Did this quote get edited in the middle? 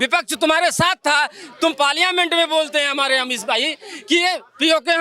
no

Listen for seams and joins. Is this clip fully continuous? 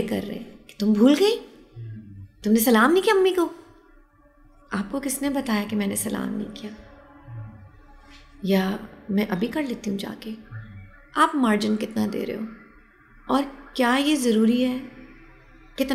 yes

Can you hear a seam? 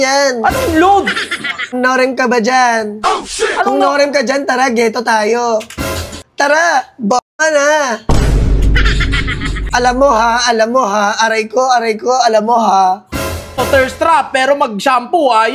yes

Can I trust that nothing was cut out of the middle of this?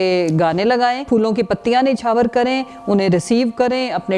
no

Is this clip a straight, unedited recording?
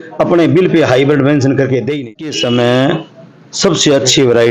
no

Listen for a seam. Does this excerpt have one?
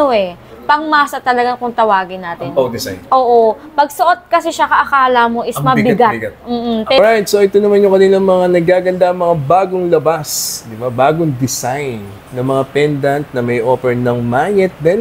yes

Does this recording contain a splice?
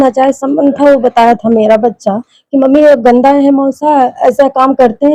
no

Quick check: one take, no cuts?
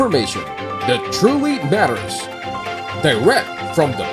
yes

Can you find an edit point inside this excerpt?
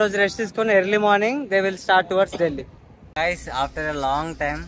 yes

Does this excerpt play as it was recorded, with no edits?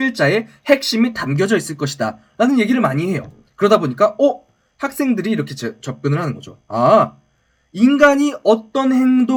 yes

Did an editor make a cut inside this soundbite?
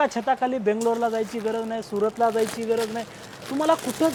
no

